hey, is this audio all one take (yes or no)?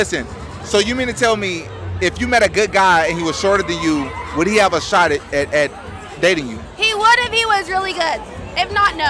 yes